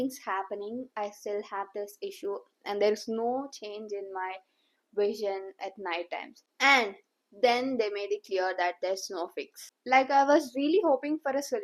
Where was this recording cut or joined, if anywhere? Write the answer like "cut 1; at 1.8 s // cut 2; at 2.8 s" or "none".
none